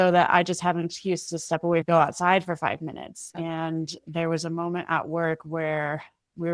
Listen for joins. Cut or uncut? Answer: cut